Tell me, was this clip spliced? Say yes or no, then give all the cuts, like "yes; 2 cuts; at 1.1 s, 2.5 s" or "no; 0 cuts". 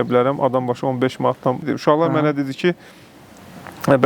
no; 0 cuts